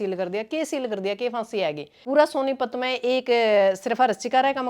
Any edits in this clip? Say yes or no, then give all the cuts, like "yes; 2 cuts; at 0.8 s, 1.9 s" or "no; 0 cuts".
yes; 1 cut; at 1.9 s